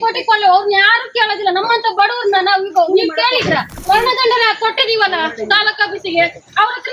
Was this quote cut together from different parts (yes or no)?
yes